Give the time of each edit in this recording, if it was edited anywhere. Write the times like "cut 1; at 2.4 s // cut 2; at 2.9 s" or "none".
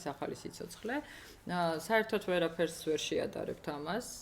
none